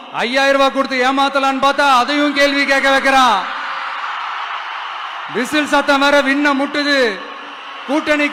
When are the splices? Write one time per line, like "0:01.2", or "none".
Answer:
none